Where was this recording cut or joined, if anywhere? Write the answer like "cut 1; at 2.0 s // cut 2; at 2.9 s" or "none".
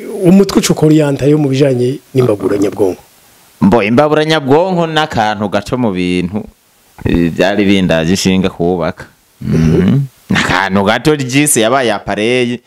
none